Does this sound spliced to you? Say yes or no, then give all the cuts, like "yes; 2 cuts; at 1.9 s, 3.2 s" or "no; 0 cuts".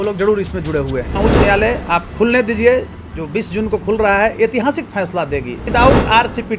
yes; 2 cuts; at 1.1 s, 5.6 s